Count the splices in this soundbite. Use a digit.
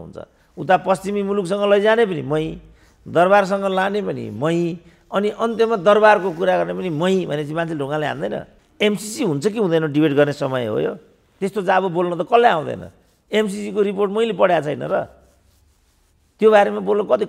2